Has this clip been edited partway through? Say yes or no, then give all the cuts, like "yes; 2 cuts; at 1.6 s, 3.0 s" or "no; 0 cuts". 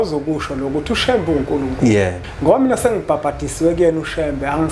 yes; 1 cut; at 2.2 s